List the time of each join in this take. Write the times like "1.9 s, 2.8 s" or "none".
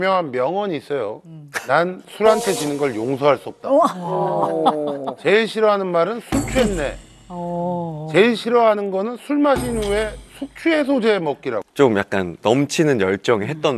none

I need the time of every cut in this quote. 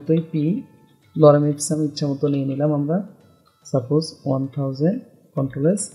none

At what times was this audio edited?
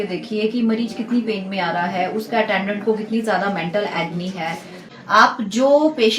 4.8 s

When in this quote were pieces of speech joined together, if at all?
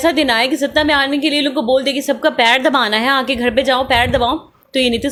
none

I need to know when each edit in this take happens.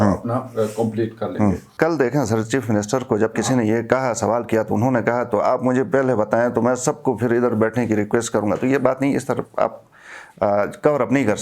1.7 s

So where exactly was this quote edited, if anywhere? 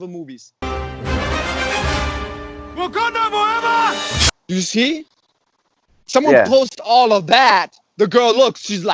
none

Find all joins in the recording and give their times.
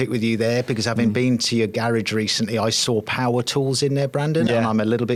none

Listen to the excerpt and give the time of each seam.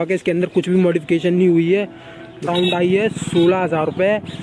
2.4 s

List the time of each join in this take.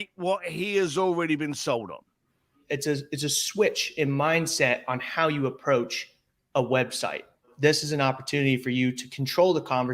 2.6 s, 7.5 s

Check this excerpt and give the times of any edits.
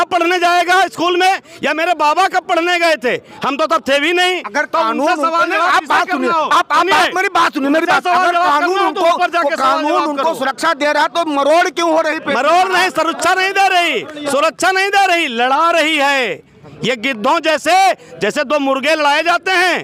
none

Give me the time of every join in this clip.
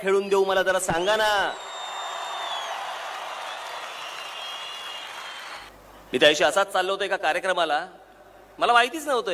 5.6 s

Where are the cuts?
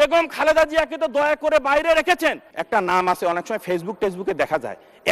2.5 s

